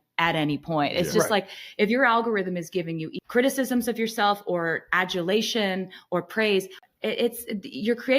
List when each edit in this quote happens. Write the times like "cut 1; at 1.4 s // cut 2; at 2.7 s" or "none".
cut 1; at 3.1 s